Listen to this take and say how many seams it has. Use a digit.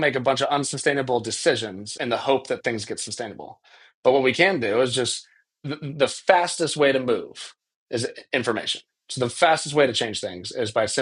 1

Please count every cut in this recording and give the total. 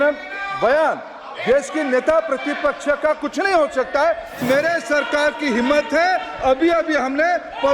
1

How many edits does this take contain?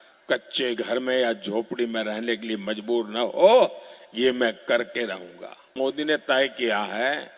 1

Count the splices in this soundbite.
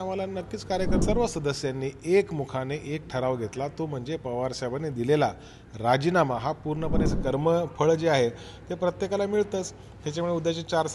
2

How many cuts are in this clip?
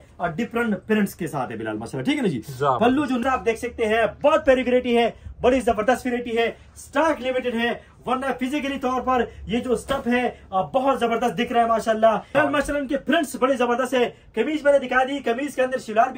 2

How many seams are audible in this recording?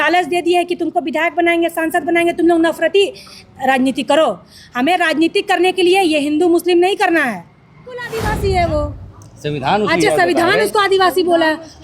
1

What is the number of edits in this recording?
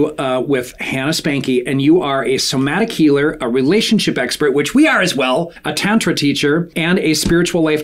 2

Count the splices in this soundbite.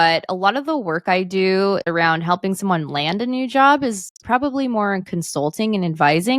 1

